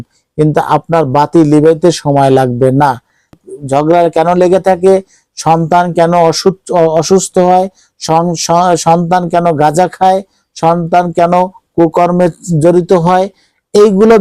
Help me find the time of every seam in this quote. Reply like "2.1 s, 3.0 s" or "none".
3.3 s

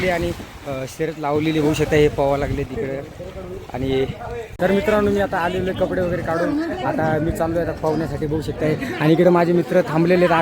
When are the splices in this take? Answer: 4.5 s

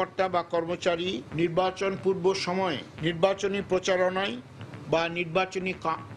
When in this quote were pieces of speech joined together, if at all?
1.2 s

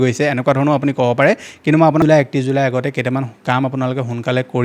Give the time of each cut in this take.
2.0 s

